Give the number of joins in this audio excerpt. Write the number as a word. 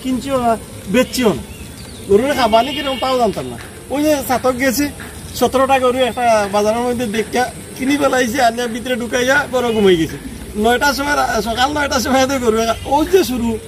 one